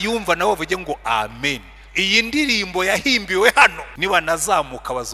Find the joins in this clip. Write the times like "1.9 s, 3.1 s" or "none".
3.9 s

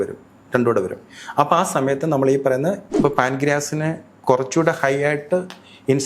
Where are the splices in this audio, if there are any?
2.9 s

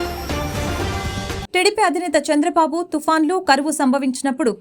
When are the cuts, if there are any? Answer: 1.3 s

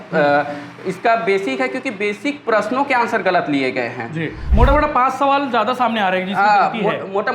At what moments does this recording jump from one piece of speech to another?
4.5 s

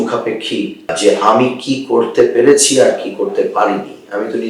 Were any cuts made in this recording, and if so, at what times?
0.9 s

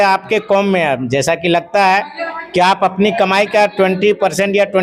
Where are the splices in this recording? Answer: none

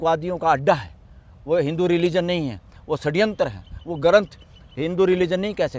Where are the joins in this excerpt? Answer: none

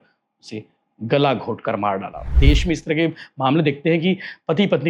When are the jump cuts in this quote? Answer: 2.3 s

